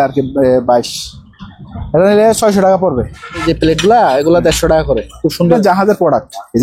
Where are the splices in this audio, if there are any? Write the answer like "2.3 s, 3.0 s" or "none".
3.4 s, 5.6 s